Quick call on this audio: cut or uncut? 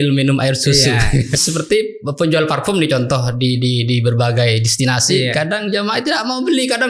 cut